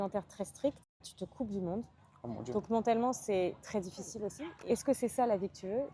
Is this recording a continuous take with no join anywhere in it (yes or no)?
no